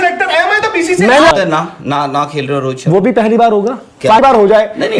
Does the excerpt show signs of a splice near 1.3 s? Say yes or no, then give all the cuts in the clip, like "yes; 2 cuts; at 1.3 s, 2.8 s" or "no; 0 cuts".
yes; 2 cuts; at 1.3 s, 4.2 s